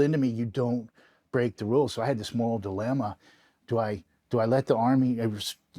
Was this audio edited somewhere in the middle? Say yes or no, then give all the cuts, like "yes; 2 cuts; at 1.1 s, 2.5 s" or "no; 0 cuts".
no; 0 cuts